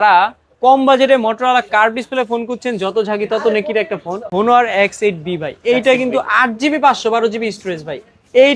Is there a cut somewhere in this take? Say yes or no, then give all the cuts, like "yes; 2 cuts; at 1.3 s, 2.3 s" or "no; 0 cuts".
yes; 1 cut; at 4.3 s